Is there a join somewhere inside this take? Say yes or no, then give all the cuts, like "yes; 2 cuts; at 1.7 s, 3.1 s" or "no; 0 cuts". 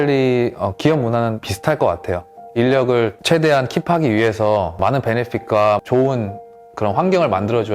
yes; 3 cuts; at 1.5 s, 3.2 s, 4.8 s